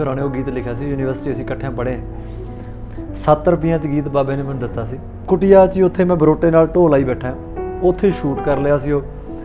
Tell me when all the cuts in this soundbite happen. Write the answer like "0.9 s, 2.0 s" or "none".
5.2 s